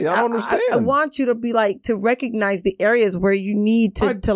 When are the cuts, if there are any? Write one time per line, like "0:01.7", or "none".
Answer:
none